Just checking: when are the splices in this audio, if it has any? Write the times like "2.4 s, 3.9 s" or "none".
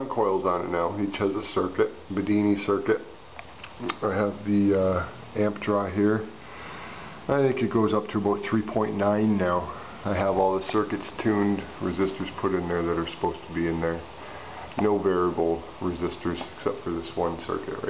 10.5 s